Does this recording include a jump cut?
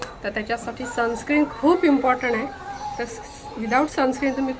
no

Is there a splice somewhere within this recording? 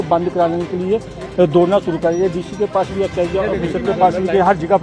no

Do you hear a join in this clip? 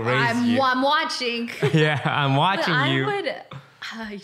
no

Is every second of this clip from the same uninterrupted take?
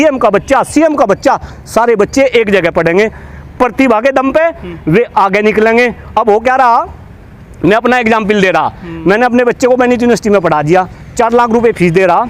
yes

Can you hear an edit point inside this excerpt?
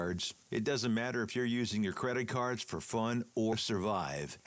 yes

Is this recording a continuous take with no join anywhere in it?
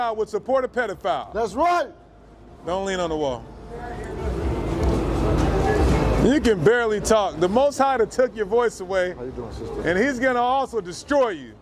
yes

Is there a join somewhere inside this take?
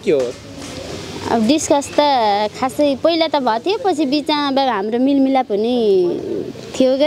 no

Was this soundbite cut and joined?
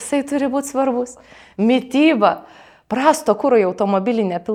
no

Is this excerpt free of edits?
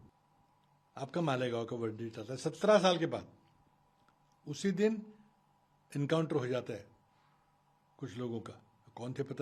yes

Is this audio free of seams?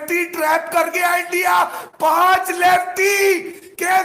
yes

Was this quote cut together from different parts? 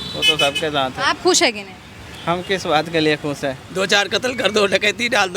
yes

